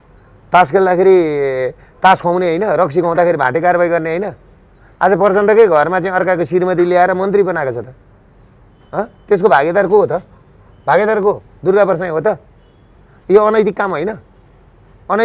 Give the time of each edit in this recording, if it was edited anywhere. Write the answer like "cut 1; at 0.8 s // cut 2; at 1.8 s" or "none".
none